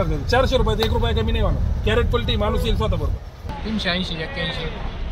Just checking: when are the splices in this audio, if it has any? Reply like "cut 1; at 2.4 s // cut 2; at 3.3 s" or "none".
cut 1; at 3.5 s